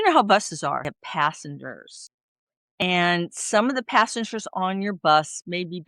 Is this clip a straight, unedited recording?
no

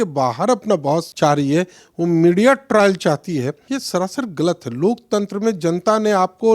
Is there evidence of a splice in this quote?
yes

